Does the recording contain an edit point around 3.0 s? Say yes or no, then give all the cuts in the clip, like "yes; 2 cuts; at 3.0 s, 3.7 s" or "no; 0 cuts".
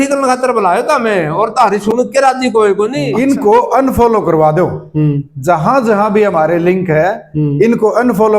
yes; 1 cut; at 3.0 s